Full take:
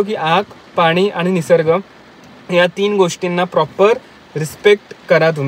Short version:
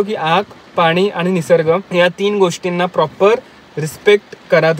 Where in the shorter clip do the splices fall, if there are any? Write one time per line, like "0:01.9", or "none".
0:01.9